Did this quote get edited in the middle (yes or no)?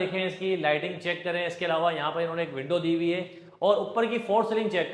no